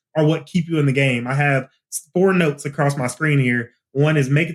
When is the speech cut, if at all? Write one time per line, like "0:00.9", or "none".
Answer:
0:02.6